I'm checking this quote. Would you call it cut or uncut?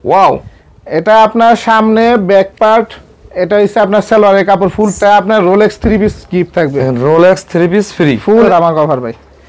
cut